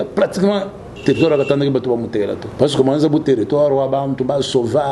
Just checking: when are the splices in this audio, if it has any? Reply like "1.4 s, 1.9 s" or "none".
2.4 s

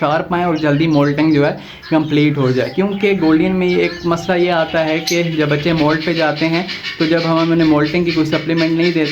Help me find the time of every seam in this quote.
none

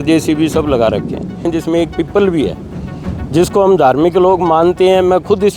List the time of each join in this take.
1.5 s

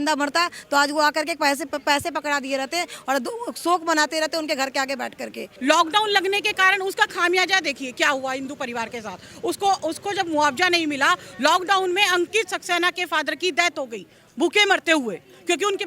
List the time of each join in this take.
5.5 s

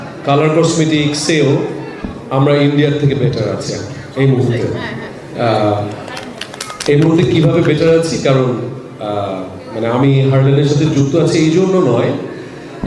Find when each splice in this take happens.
none

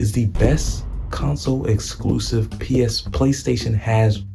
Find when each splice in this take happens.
none

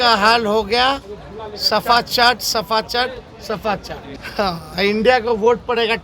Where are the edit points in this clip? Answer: 4.1 s

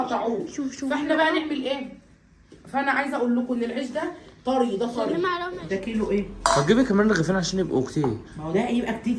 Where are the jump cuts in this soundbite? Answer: 5.5 s

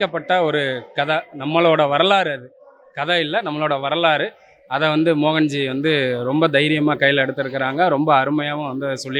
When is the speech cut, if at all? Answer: none

